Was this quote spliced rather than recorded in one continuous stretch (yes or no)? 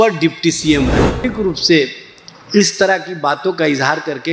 yes